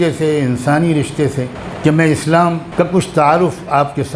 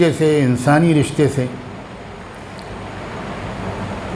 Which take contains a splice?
first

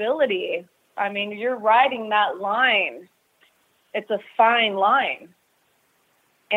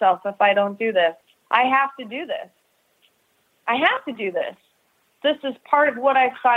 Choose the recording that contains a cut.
second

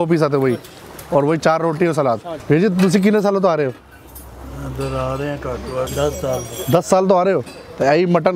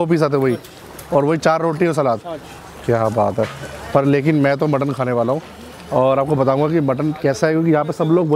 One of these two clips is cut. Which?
first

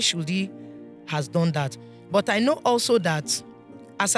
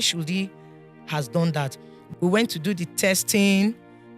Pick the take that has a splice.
second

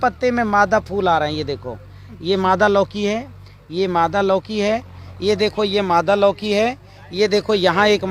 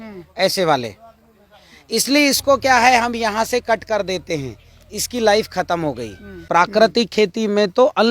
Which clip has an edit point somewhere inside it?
second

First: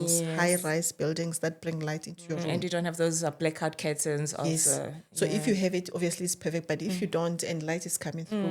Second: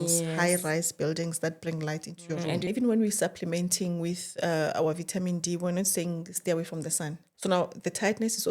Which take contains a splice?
second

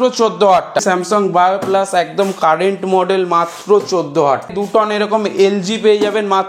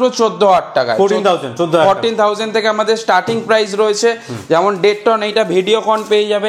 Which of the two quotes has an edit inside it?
first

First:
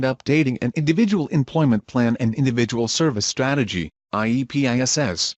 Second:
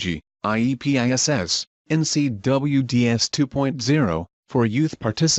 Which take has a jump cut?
second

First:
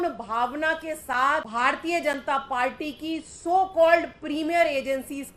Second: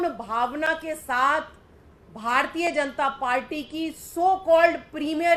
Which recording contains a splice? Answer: first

